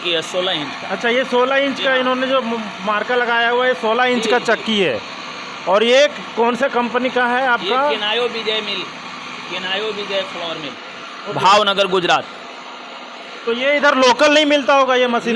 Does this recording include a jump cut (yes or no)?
no